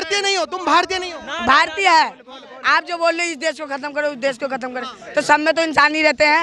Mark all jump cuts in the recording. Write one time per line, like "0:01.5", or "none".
none